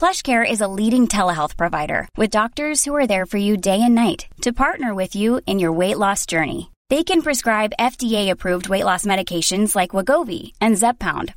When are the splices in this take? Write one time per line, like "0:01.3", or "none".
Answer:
none